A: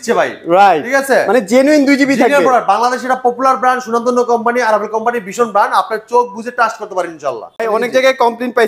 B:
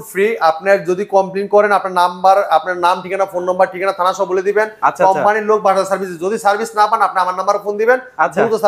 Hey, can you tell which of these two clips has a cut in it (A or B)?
A